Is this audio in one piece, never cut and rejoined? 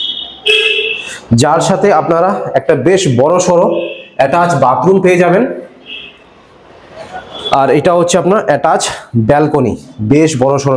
yes; 0 cuts

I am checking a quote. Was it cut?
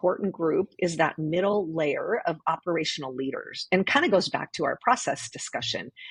no; 0 cuts

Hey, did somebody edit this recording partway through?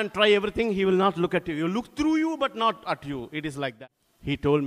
yes; 1 cut; at 3.7 s

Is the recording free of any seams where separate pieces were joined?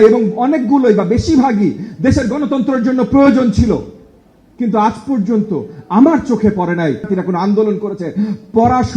no; 1 cut; at 7.0 s

